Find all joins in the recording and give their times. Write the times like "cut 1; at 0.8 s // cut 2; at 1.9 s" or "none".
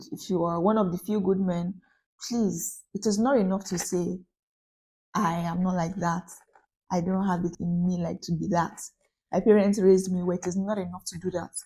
cut 1; at 7.6 s